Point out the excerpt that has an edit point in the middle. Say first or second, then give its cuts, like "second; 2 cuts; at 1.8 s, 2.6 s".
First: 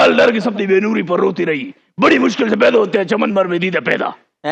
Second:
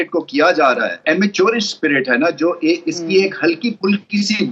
second; 1 cut; at 1.0 s